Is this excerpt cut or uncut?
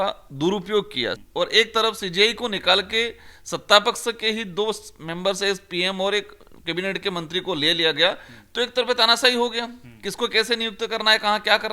cut